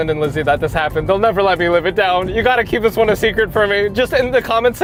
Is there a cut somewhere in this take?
no; 0 cuts

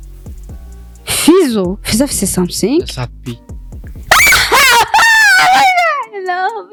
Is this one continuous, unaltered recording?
yes; 0 cuts

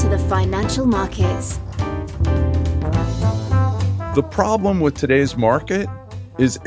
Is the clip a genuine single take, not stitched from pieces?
no; 1 cut; at 3.9 s

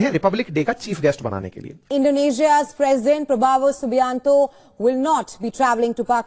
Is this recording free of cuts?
no; 1 cut; at 1.9 s

